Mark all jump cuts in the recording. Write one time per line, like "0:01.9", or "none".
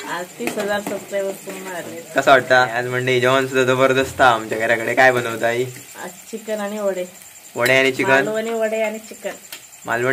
0:02.8